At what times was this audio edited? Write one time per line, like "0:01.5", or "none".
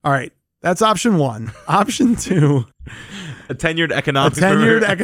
none